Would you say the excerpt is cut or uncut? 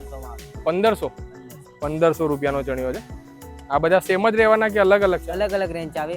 uncut